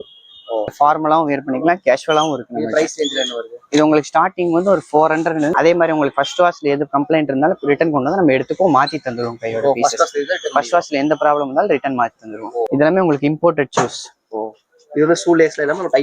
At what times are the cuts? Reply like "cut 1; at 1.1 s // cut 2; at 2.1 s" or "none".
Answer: cut 1; at 0.7 s // cut 2; at 5.5 s // cut 3; at 12.7 s